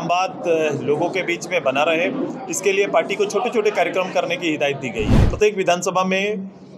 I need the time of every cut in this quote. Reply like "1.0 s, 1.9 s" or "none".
5.2 s